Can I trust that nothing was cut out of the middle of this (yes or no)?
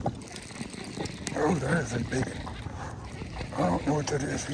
yes